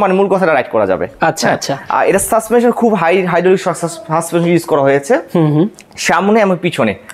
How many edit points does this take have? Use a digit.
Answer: 0